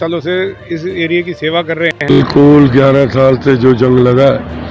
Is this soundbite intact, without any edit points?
no; 1 cut; at 2.2 s

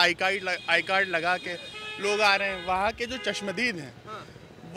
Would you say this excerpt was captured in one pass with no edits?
yes; 0 cuts

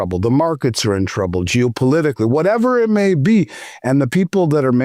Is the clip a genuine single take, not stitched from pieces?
yes; 0 cuts

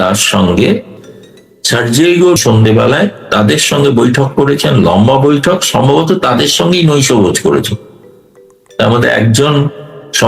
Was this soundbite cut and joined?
yes; 2 cuts; at 1.0 s, 2.4 s

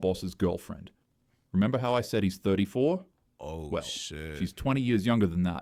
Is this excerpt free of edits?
yes; 0 cuts

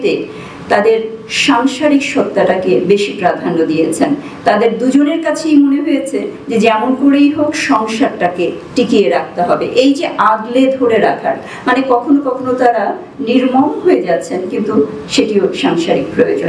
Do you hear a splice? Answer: no; 0 cuts

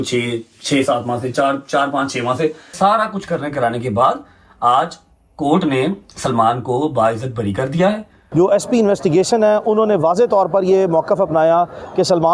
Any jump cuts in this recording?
yes; 2 cuts; at 2.7 s, 8.2 s

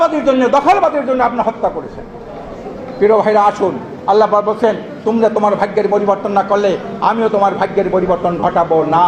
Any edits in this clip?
no; 0 cuts

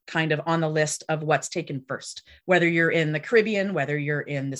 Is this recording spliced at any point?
no; 0 cuts

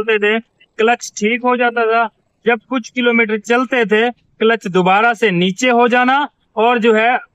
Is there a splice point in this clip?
no; 0 cuts

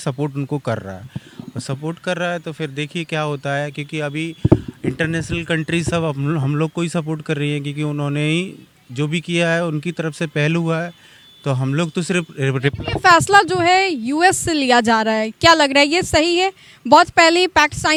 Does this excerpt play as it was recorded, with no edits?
yes; 0 cuts

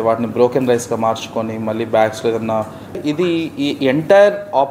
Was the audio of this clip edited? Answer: yes; 1 cut; at 3.0 s

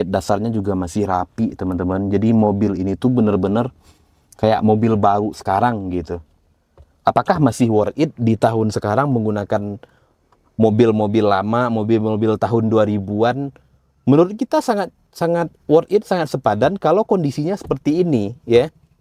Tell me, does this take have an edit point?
no; 0 cuts

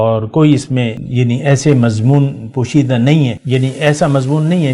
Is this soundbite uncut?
no; 2 cuts; at 1.0 s, 3.4 s

